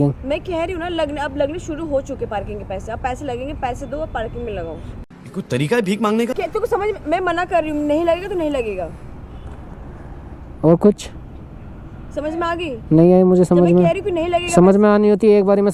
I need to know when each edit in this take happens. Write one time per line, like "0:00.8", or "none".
0:04.9
0:06.4